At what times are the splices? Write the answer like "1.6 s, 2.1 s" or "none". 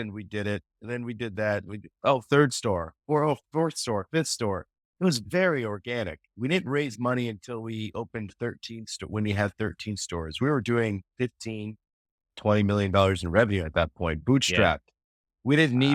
none